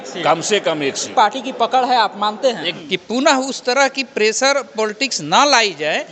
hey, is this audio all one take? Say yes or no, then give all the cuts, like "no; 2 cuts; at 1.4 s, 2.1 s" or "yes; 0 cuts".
no; 2 cuts; at 1.0 s, 2.7 s